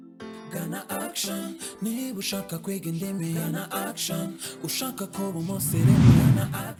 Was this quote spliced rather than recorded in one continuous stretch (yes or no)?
no